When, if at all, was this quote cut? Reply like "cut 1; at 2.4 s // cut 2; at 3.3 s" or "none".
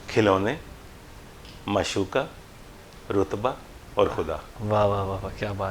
none